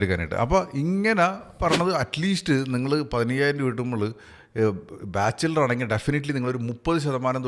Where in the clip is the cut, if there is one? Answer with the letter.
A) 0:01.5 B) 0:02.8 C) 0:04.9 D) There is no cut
A